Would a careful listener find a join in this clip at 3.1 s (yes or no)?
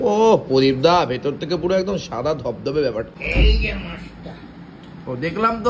yes